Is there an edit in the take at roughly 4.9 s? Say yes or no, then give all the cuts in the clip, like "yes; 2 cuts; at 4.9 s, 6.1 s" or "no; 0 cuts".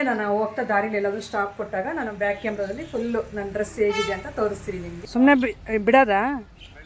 yes; 1 cut; at 4.9 s